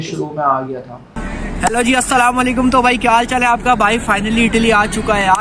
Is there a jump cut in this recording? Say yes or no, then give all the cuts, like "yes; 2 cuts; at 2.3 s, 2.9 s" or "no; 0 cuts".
no; 0 cuts